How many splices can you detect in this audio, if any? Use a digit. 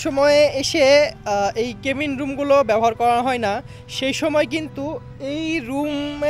0